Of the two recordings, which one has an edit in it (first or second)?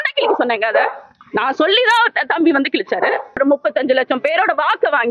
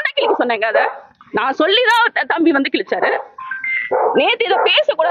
first